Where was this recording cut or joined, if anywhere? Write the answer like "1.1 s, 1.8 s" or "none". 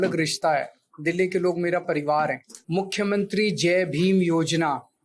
2.5 s